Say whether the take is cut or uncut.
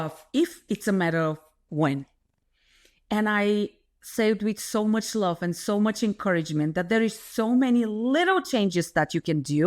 uncut